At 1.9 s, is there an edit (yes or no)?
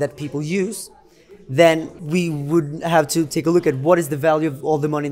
yes